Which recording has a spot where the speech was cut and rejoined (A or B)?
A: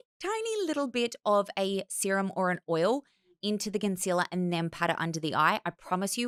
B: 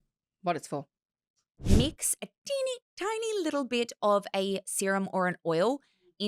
B